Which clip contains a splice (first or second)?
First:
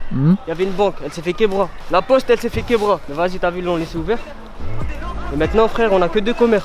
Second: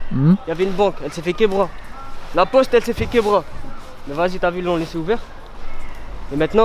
first